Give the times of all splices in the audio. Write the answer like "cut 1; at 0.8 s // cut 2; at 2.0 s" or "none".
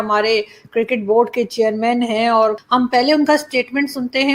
none